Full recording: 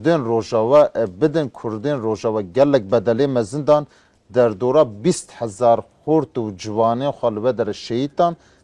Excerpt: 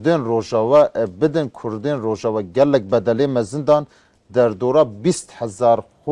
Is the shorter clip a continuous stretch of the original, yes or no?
yes